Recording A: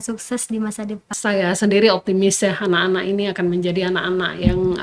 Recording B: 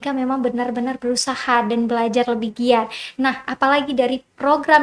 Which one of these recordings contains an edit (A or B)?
A